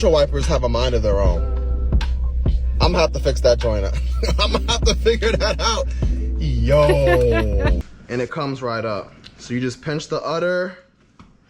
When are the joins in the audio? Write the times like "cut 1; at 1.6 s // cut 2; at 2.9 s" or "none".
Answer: cut 1; at 7.8 s